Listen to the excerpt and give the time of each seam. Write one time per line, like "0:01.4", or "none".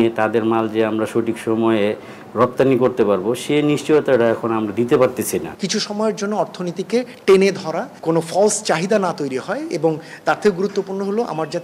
0:05.6
0:07.9